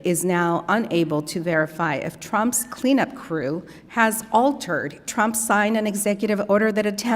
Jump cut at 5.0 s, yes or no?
yes